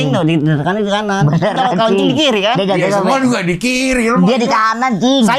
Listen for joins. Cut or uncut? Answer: uncut